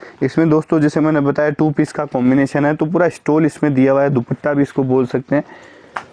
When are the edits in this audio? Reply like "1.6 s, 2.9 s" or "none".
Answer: none